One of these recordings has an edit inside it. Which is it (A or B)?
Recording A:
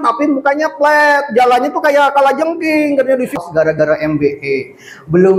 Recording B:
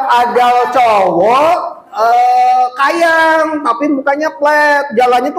A